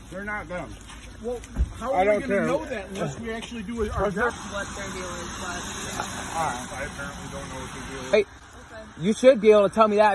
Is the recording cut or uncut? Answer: cut